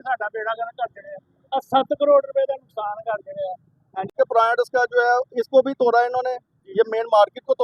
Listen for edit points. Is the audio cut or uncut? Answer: cut